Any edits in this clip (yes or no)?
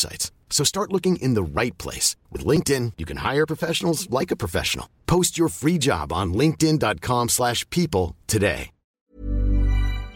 yes